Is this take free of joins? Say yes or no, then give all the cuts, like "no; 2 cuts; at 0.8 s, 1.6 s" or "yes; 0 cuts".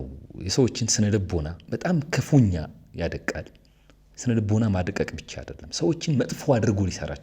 no; 1 cut; at 1.6 s